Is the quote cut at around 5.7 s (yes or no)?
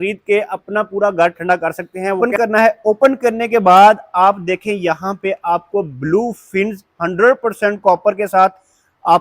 no